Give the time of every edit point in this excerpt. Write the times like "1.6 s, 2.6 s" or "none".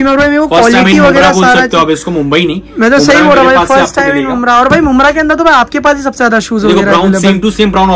none